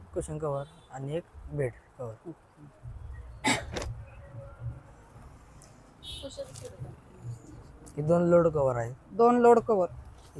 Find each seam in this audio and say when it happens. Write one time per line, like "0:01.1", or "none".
none